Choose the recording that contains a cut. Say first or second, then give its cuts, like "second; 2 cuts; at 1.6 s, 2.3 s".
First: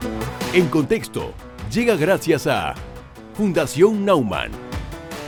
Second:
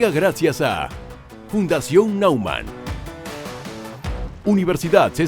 second; 1 cut; at 4.4 s